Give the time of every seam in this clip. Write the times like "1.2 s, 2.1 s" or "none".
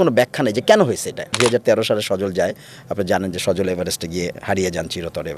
1.4 s